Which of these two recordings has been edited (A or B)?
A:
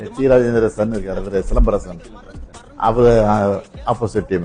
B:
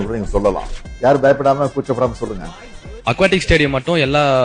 B